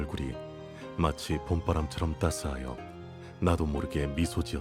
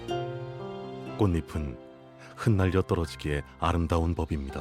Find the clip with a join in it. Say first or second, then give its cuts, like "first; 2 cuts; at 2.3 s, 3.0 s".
second; 1 cut; at 1.0 s